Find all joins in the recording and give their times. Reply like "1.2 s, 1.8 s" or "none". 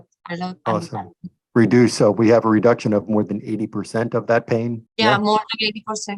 none